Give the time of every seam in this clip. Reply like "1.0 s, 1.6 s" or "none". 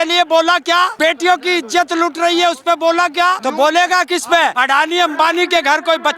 0.9 s, 3.4 s, 4.6 s